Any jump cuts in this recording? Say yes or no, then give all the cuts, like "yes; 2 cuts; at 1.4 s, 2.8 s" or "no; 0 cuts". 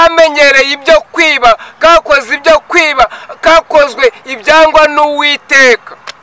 no; 0 cuts